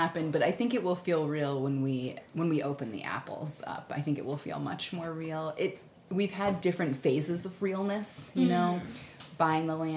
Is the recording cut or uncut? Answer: cut